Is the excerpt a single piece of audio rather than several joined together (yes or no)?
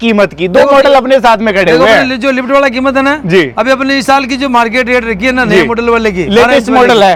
yes